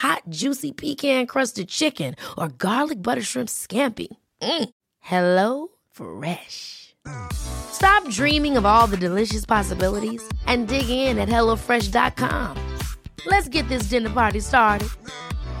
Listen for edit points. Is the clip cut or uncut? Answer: uncut